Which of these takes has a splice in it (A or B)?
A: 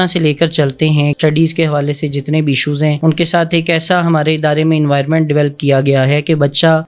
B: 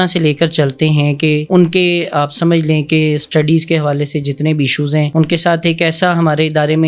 A